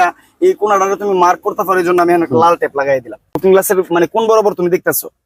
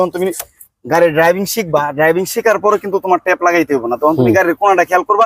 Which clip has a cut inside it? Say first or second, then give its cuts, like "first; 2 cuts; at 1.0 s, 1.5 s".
first; 1 cut; at 3.4 s